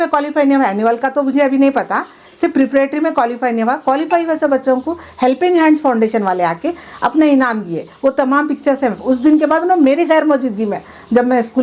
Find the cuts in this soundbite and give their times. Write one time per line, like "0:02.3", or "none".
none